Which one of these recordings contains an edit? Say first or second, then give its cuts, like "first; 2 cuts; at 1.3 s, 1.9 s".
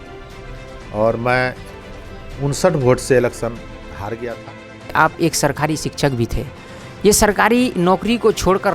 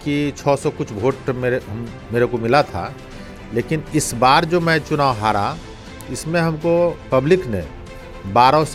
first; 1 cut; at 4.8 s